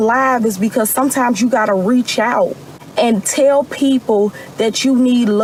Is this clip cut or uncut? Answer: uncut